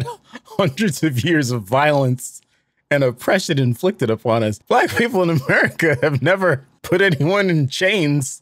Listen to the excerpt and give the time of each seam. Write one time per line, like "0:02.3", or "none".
0:04.6
0:06.7

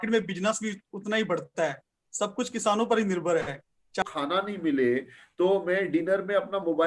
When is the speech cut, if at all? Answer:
0:04.0

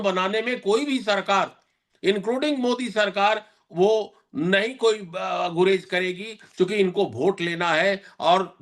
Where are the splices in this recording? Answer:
none

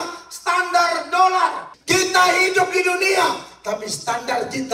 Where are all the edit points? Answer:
0:01.7

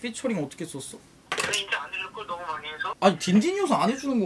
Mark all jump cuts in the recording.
0:03.0

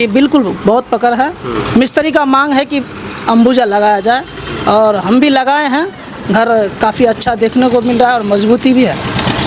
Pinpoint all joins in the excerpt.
none

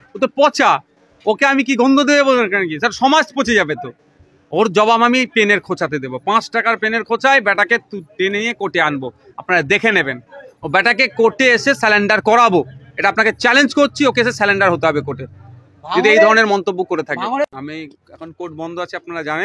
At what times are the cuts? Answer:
0:17.5

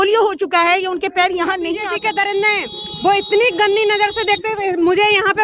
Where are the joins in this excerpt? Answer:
0:01.8

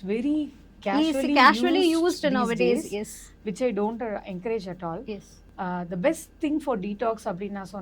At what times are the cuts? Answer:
0:05.3

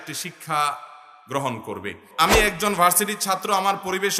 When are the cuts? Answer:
0:02.1

